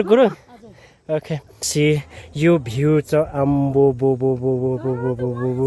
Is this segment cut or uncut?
cut